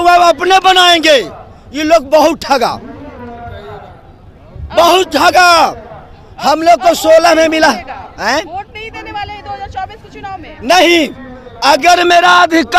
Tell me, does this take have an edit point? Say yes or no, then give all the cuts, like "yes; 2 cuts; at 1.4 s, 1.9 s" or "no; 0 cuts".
no; 0 cuts